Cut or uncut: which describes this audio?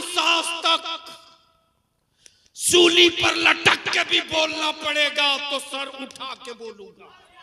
uncut